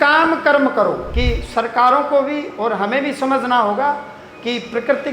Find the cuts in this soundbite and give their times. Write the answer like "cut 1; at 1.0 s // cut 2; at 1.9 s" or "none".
cut 1; at 1.1 s